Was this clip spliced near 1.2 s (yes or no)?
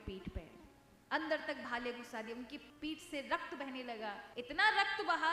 no